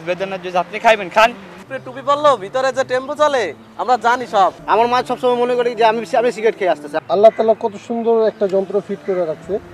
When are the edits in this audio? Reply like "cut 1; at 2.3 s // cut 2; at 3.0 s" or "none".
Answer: cut 1; at 1.5 s // cut 2; at 4.6 s // cut 3; at 6.9 s